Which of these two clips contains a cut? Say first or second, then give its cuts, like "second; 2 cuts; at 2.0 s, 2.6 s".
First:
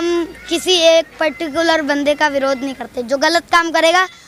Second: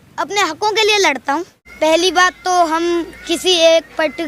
second; 1 cut; at 1.6 s